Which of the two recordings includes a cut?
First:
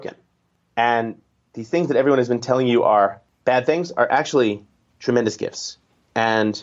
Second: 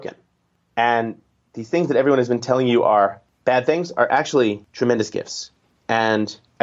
second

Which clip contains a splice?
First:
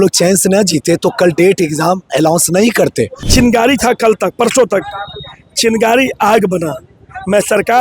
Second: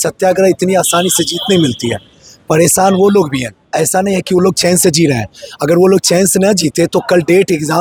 first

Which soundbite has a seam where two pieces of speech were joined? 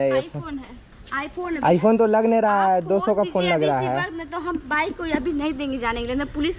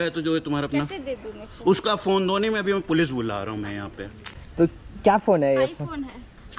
second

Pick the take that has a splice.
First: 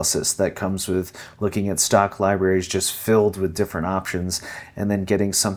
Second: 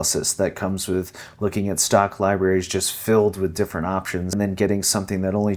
second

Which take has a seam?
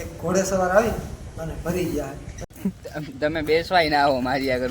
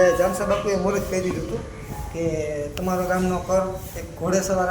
first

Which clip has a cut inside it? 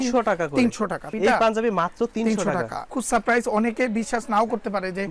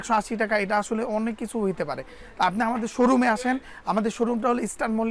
first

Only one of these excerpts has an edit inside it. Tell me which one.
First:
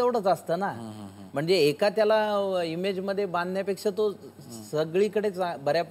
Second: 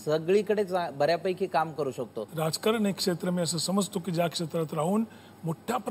second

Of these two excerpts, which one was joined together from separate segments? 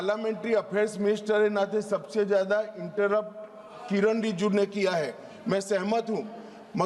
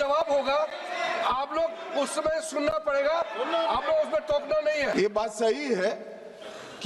second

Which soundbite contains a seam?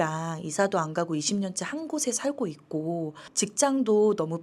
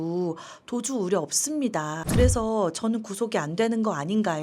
second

